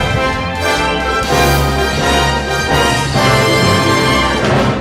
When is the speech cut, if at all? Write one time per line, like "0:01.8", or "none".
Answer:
0:01.1